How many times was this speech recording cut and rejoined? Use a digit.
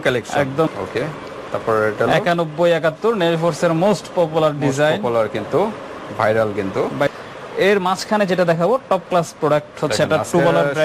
2